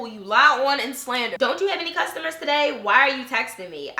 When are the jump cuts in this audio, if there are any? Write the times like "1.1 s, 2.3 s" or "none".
1.3 s

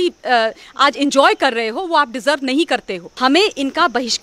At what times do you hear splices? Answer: 3.0 s

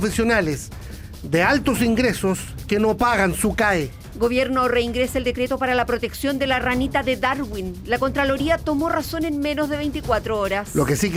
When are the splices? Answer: none

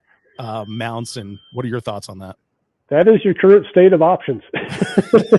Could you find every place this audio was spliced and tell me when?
none

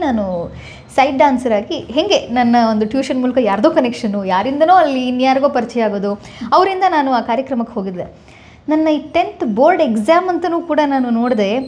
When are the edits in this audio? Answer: none

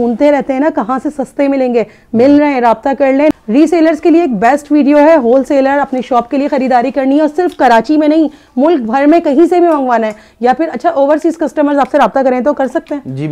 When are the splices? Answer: 3.3 s

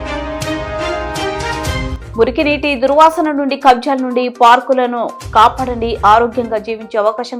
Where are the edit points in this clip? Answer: 1.9 s

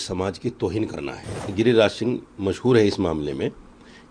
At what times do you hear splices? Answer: 1.4 s

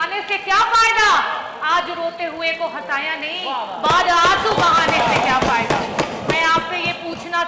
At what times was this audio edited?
none

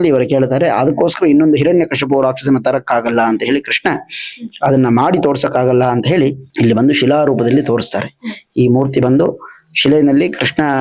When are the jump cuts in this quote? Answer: none

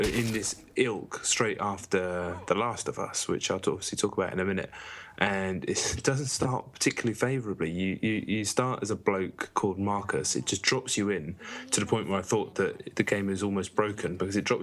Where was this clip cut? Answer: 5.4 s

